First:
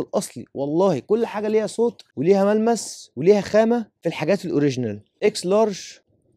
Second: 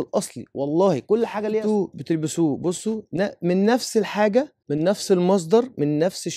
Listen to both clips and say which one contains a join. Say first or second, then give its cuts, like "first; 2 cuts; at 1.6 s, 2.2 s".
second; 1 cut; at 1.6 s